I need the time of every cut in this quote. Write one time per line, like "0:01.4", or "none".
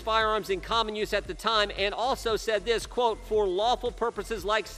none